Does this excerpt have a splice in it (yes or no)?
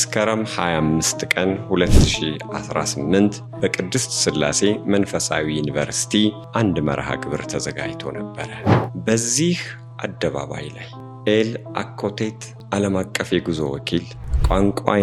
yes